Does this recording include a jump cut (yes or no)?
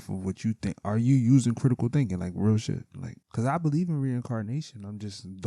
yes